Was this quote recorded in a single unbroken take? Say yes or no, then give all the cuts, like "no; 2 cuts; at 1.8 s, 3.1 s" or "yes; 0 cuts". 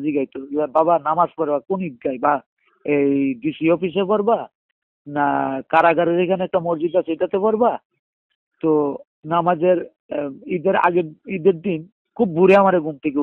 yes; 0 cuts